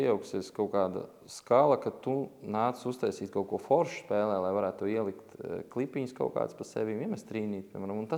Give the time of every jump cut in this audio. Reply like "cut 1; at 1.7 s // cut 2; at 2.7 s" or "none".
none